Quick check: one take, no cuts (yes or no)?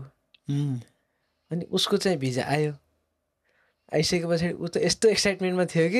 yes